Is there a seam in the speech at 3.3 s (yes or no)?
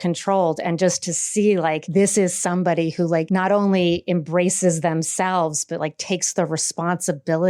yes